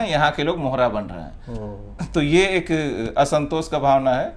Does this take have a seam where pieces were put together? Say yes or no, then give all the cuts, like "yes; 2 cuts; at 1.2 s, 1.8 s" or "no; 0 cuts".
no; 0 cuts